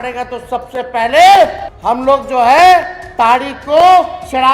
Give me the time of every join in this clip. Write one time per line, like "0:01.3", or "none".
0:01.7